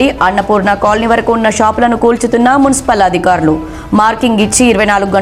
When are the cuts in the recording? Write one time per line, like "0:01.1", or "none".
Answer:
none